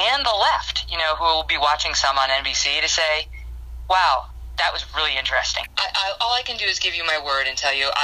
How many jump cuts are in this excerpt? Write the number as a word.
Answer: zero